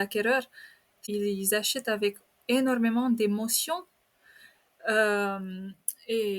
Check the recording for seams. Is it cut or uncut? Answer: cut